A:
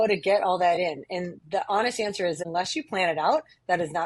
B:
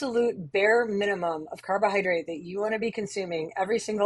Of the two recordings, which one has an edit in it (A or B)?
A